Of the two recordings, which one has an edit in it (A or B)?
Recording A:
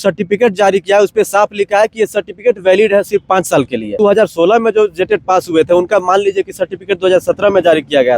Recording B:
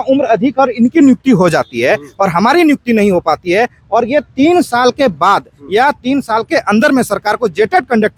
A